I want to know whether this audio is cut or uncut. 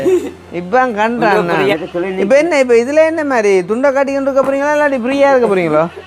cut